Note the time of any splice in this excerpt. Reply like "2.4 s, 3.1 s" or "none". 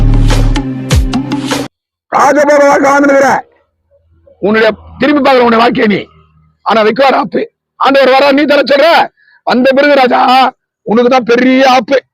1.7 s